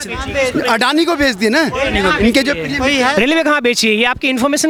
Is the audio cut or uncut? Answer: uncut